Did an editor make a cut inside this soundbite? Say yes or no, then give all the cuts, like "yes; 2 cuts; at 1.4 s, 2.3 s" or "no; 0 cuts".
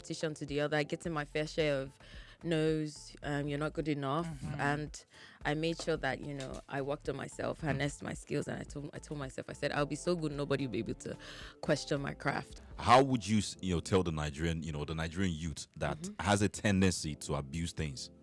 yes; 1 cut; at 12.5 s